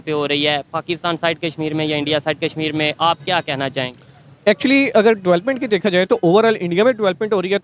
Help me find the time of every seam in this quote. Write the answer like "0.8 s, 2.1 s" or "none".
none